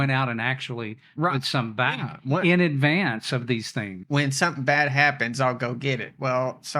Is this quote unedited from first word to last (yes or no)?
no